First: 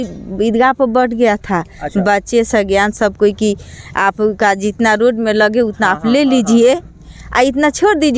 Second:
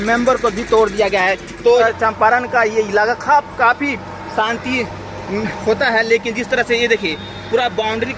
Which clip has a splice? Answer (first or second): second